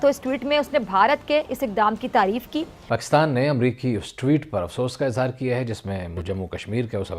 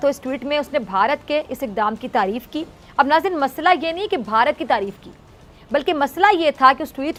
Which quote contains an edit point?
first; 2 cuts; at 2.9 s, 6.2 s

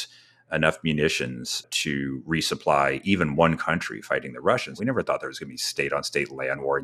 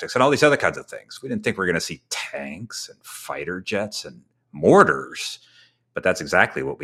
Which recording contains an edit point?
first; 2 cuts; at 1.7 s, 4.7 s

